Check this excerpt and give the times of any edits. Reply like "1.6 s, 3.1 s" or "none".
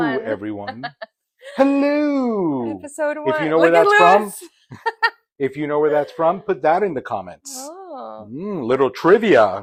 none